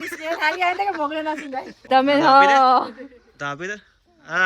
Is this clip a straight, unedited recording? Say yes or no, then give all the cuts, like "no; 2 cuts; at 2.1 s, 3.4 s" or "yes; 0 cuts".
no; 1 cut; at 1.7 s